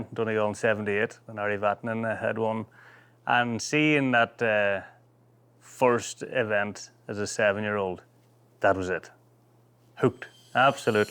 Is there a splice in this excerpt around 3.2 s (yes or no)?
no